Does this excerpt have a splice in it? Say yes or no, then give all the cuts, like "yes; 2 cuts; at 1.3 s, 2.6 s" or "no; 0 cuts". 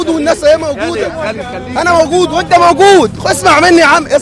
no; 0 cuts